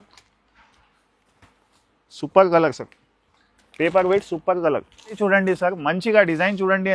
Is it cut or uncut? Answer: cut